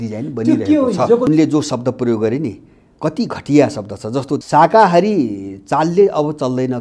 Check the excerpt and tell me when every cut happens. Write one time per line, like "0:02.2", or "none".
0:01.3
0:04.4